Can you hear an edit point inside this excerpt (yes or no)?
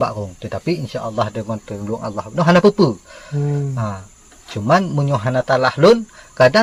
no